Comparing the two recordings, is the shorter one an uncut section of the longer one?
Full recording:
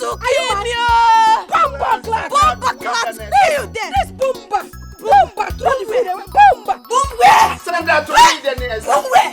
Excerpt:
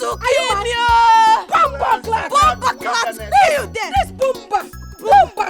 yes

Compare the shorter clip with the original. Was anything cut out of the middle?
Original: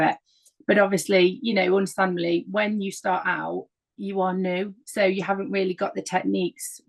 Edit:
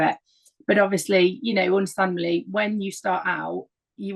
no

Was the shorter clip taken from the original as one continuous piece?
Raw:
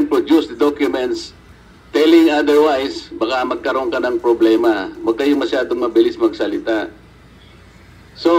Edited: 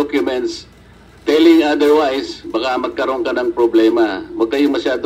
yes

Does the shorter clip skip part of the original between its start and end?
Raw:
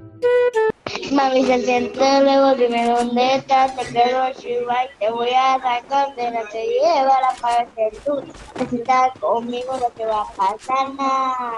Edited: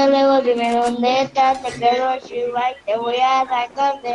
no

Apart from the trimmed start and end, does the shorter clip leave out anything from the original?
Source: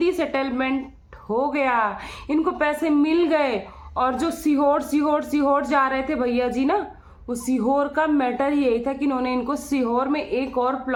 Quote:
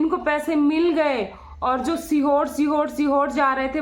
no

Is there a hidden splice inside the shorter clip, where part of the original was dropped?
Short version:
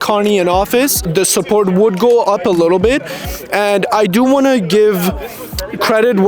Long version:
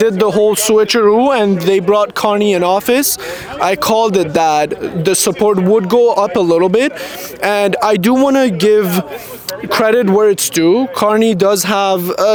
yes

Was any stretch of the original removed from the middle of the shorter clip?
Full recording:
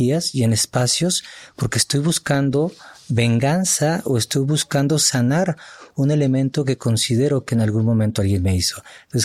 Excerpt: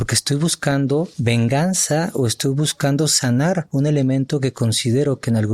yes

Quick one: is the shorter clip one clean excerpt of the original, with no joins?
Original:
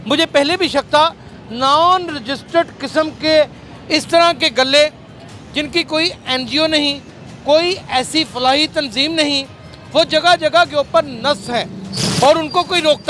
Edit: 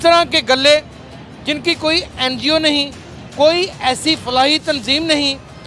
yes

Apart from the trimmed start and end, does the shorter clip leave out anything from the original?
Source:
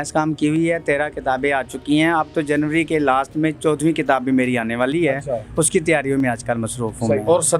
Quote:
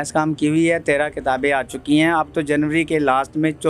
no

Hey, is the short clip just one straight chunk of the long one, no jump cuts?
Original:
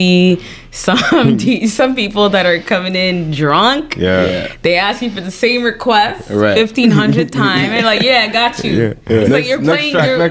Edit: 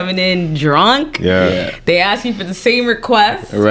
yes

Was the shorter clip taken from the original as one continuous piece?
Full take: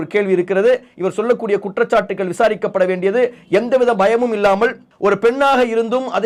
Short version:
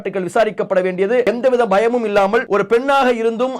no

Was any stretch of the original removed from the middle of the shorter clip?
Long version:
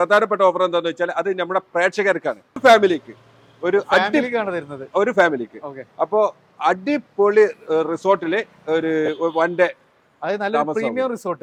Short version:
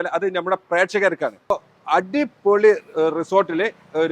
yes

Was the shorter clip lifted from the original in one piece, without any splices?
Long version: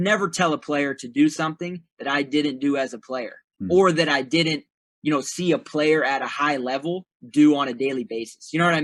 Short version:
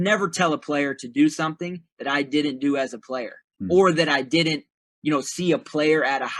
yes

